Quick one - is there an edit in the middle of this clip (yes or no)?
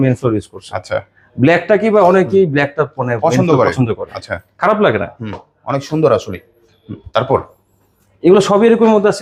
no